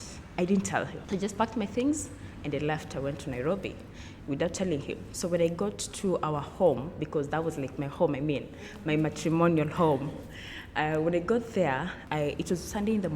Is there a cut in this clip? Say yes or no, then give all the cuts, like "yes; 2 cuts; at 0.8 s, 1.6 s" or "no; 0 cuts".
no; 0 cuts